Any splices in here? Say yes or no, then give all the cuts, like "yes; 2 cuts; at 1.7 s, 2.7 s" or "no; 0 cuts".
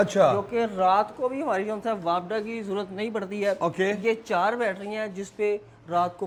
no; 0 cuts